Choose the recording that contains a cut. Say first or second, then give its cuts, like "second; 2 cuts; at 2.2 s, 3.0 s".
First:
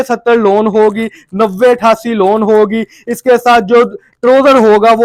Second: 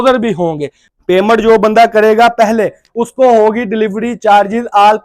second; 1 cut; at 1.0 s